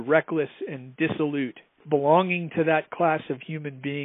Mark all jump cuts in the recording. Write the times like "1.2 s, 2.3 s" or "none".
1.8 s